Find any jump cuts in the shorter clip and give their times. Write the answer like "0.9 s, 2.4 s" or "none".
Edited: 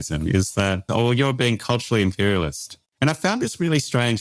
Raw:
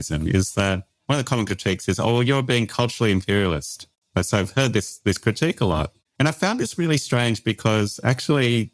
0.9 s, 2.8 s